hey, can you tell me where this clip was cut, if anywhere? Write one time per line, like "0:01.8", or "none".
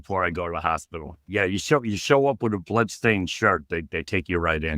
0:01.3